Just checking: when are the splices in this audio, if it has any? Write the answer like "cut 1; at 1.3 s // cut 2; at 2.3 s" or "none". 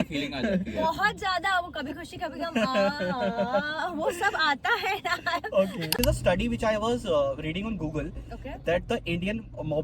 cut 1; at 5.9 s